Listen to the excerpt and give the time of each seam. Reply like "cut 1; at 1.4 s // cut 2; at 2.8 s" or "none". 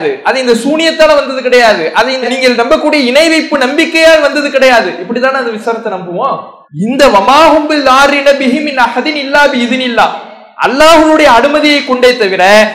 cut 1; at 6.6 s